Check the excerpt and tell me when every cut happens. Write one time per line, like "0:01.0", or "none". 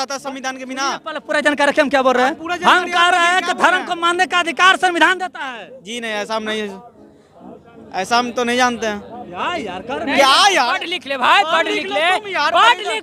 none